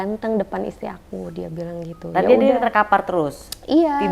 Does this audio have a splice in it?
no; 0 cuts

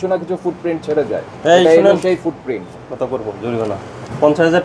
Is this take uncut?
yes; 0 cuts

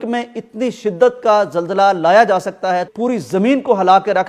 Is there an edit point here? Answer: yes; 1 cut; at 2.9 s

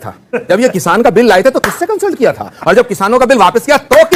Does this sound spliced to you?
no; 0 cuts

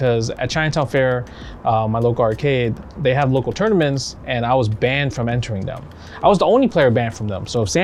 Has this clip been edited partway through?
no; 0 cuts

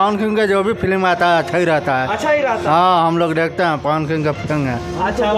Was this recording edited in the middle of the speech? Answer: no; 0 cuts

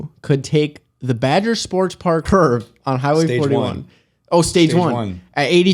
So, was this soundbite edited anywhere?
yes; 1 cut; at 2.2 s

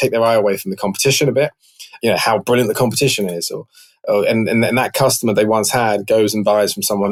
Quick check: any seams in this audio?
no; 0 cuts

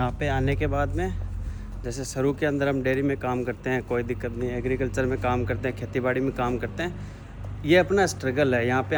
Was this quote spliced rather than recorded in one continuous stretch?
no; 0 cuts

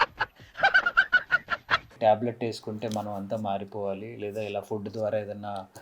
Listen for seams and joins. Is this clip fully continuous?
no; 1 cut; at 1.9 s

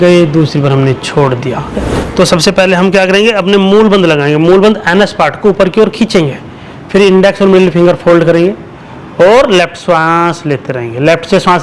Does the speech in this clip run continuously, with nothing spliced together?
no; 1 cut; at 1.8 s

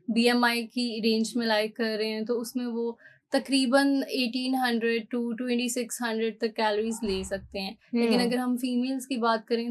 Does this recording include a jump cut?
no; 0 cuts

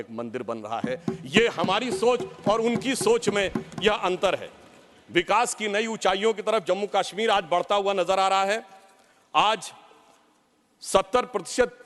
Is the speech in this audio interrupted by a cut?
no; 0 cuts

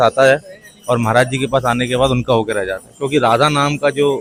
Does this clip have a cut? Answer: no; 0 cuts

